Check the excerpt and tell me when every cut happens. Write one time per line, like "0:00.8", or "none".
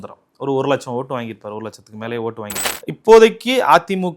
0:02.7